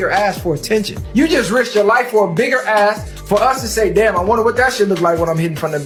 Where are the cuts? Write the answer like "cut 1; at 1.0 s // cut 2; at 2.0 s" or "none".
none